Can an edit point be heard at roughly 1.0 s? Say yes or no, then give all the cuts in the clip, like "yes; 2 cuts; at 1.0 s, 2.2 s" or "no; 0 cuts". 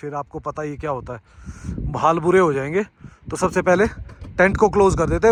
no; 0 cuts